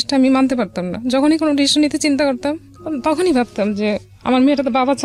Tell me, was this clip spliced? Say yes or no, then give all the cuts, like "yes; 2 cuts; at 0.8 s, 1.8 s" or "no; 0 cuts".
no; 0 cuts